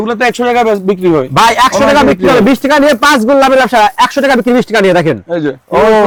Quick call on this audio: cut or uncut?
uncut